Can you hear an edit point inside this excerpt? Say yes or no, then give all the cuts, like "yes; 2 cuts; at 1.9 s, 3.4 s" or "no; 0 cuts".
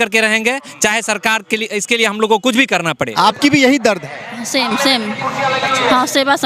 yes; 1 cut; at 3.1 s